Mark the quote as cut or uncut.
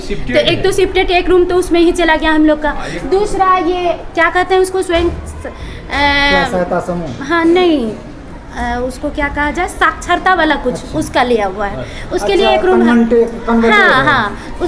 uncut